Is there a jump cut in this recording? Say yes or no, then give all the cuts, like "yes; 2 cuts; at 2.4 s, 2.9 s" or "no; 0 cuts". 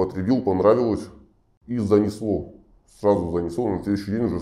no; 0 cuts